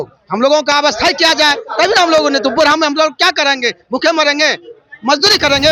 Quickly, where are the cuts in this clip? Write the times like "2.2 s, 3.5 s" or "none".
none